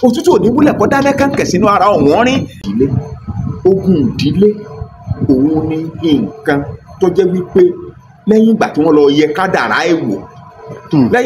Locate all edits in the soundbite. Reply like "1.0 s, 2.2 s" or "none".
2.6 s